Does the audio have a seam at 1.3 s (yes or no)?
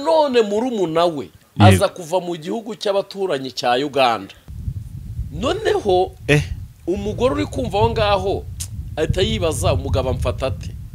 no